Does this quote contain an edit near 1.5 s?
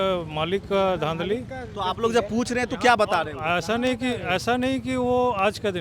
no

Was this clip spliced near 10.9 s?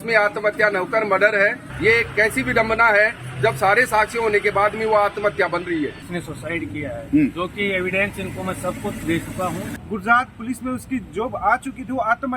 no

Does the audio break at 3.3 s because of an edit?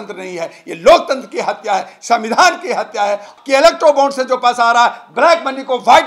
yes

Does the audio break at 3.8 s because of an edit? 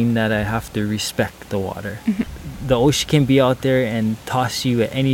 no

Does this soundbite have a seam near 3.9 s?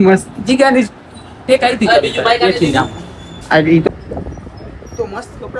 yes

